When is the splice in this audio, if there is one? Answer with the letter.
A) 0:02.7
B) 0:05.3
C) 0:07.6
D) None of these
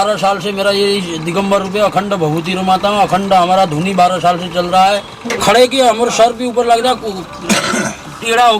B